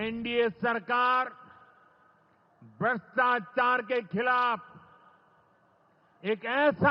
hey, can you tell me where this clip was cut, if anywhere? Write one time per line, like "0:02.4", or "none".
none